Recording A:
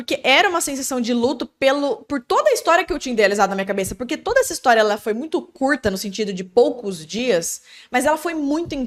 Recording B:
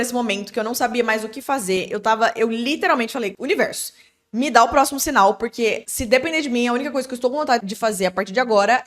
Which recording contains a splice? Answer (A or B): B